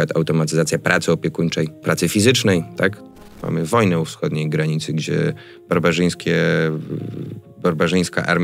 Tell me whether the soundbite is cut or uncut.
cut